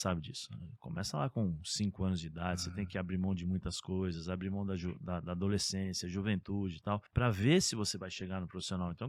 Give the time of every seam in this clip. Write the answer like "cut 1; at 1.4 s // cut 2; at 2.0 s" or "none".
cut 1; at 7.1 s